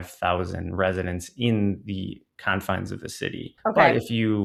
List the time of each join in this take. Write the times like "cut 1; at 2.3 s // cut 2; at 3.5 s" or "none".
none